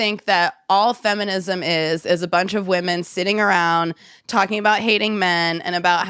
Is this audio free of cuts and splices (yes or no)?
yes